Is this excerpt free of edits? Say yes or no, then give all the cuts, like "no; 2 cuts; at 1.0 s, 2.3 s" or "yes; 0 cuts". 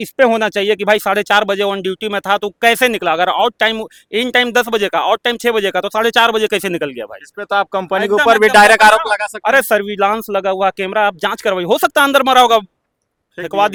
yes; 0 cuts